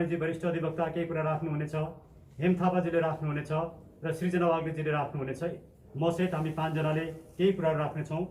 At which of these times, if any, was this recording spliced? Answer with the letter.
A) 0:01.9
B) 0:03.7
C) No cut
C